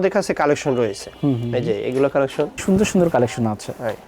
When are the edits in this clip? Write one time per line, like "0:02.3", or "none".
0:02.6